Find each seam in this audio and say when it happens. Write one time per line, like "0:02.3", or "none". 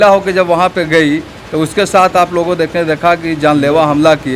none